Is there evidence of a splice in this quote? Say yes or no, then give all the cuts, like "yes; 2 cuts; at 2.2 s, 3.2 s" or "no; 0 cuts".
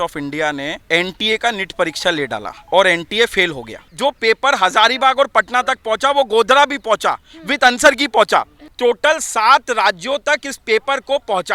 yes; 4 cuts; at 0.8 s, 2.5 s, 3.8 s, 8.6 s